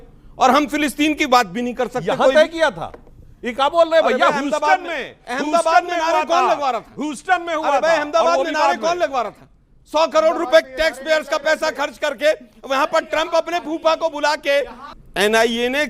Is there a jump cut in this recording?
yes; 1 cut; at 14.8 s

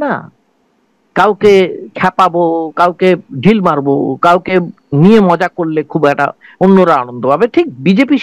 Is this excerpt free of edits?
yes; 0 cuts

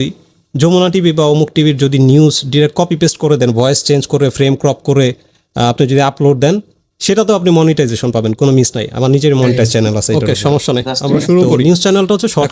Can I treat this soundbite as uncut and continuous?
yes; 0 cuts

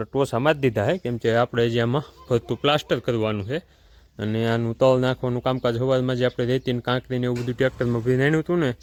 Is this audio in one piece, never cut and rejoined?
yes; 0 cuts

